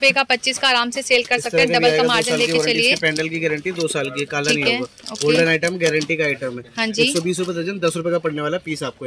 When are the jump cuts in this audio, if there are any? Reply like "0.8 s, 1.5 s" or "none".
none

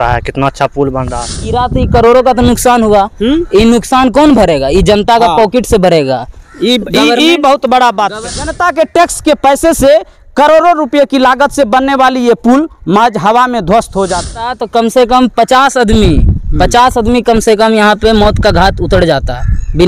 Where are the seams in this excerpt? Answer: 1.5 s, 8.2 s, 14.6 s

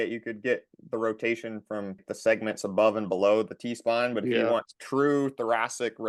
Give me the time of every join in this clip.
2.1 s

